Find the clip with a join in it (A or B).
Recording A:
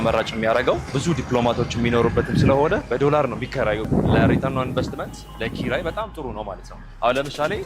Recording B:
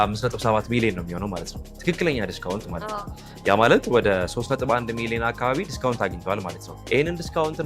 A